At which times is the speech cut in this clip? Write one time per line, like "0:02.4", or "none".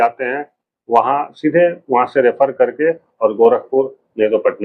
none